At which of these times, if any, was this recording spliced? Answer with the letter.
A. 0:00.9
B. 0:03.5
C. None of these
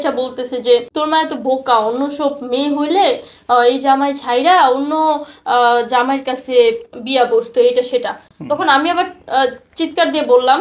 A